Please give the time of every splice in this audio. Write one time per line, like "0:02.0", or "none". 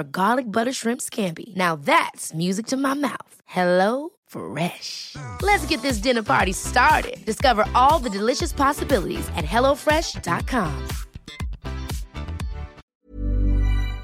0:12.8